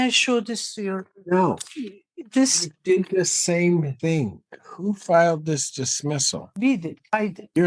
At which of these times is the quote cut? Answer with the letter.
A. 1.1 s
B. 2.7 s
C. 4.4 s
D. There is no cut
C